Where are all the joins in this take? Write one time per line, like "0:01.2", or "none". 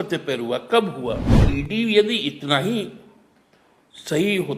0:01.3